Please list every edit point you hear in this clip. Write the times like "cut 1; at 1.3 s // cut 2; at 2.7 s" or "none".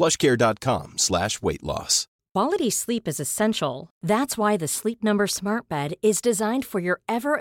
none